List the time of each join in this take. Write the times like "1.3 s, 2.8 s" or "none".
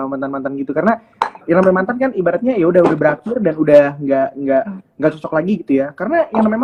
none